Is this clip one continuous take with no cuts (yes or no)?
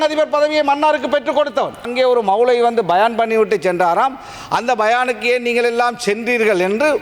no